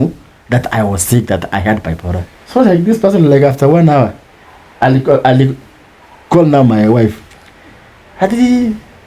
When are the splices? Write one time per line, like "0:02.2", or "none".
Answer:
0:02.3